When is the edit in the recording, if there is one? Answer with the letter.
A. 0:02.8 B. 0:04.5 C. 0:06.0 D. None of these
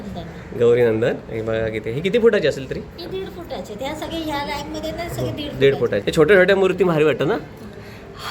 C